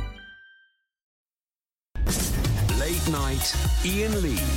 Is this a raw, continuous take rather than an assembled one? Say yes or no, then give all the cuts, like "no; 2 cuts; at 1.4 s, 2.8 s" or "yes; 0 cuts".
yes; 0 cuts